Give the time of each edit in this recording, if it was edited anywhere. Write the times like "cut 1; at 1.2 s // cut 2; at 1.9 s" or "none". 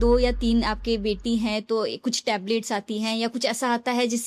none